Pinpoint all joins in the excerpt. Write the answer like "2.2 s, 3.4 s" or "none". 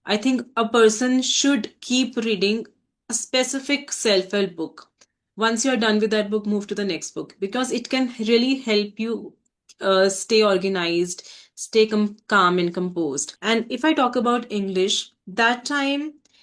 13.3 s